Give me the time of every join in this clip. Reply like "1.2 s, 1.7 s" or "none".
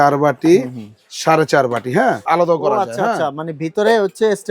2.3 s

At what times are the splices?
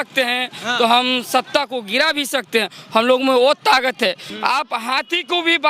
4.3 s

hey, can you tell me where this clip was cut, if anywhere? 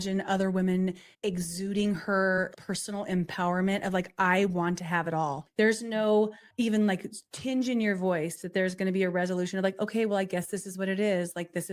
1.1 s, 2.6 s, 5.4 s, 6.4 s

